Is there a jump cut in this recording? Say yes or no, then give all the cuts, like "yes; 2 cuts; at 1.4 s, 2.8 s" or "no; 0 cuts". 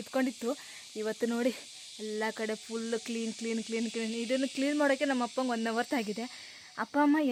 no; 0 cuts